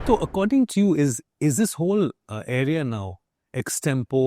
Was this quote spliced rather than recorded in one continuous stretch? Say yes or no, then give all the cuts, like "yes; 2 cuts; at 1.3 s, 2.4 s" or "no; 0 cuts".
yes; 1 cut; at 1.2 s